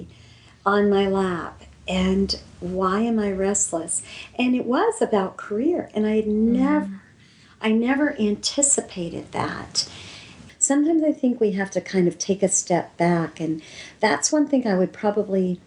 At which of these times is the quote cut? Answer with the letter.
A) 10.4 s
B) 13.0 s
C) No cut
A